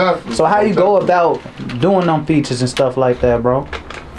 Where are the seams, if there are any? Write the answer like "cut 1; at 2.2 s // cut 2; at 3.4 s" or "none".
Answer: none